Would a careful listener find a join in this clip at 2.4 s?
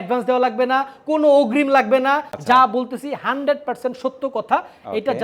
yes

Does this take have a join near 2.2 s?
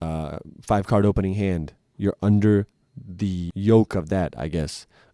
no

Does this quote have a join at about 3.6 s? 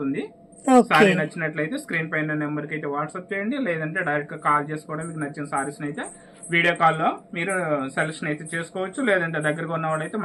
no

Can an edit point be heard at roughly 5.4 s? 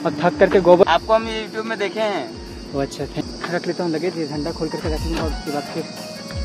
no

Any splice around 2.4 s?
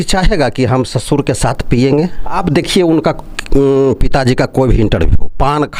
yes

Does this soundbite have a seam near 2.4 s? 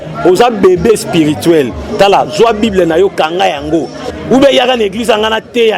no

